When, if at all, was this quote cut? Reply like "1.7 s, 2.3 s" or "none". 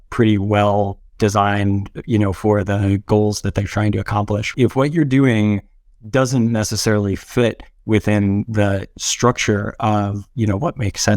4.5 s